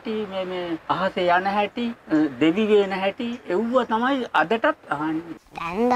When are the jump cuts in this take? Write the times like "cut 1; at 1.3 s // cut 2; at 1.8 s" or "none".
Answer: cut 1; at 0.8 s // cut 2; at 2.0 s // cut 3; at 5.2 s